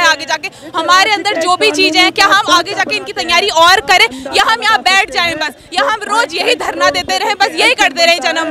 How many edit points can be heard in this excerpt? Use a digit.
0